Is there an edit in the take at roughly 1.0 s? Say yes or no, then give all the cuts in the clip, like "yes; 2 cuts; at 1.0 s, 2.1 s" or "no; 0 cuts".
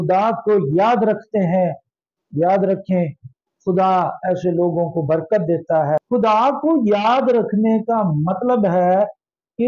no; 1 cut; at 6.0 s